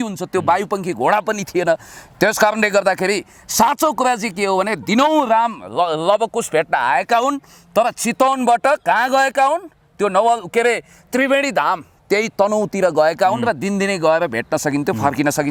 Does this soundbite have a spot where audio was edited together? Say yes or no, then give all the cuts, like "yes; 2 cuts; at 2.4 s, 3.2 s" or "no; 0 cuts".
no; 0 cuts